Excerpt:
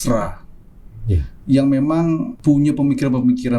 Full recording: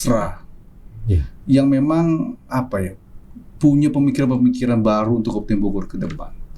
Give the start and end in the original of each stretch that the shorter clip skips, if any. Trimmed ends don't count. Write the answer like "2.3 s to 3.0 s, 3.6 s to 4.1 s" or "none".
2.3 s to 3.5 s